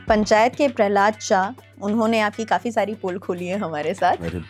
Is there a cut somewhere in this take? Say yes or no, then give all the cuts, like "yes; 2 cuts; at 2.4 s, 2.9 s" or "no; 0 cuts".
no; 0 cuts